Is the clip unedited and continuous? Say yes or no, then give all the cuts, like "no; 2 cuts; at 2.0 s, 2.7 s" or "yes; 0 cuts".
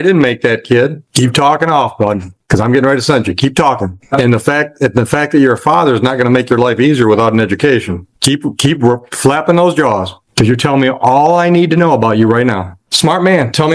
no; 4 cuts; at 1.0 s, 4.0 s, 8.1 s, 12.8 s